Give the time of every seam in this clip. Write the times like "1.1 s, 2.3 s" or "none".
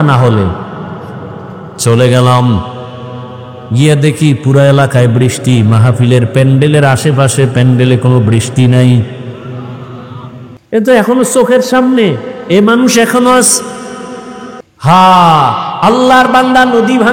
none